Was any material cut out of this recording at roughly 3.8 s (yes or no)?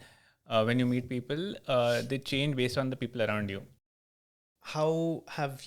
yes